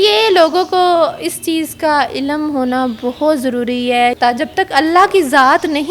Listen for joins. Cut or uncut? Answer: cut